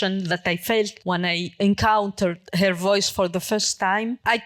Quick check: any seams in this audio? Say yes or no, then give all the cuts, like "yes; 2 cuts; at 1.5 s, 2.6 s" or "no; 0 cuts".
no; 0 cuts